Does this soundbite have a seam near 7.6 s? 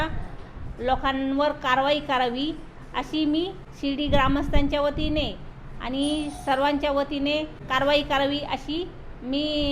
yes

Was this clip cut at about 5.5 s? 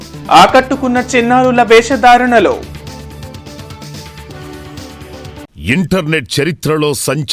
yes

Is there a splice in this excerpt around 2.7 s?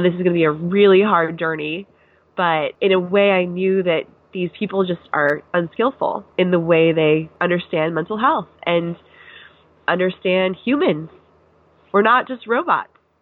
yes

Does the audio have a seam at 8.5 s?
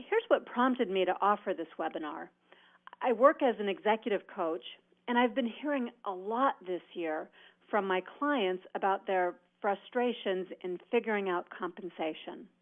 no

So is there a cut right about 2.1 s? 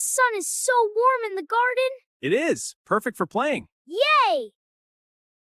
yes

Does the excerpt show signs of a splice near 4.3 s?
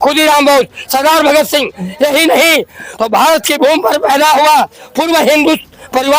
no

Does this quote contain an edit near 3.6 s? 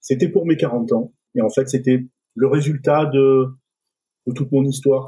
no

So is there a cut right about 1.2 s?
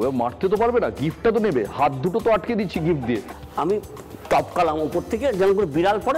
no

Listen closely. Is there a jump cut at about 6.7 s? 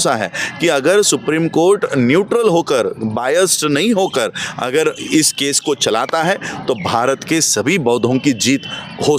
no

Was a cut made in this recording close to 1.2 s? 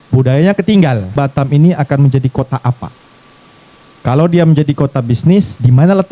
yes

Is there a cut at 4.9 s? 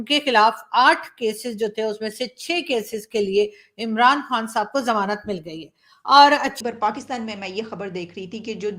no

